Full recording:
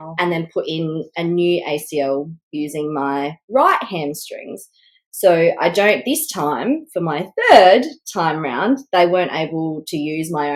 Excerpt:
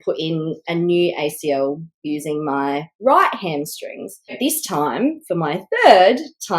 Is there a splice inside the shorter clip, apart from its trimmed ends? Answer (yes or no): yes